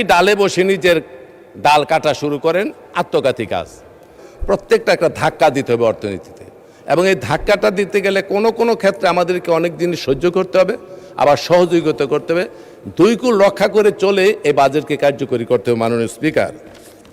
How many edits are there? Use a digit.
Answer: 1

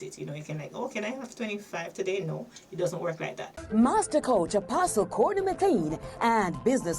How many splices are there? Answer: 1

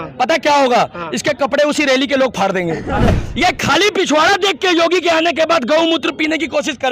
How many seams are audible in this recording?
1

